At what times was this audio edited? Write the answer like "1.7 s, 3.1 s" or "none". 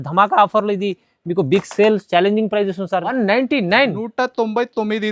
3.1 s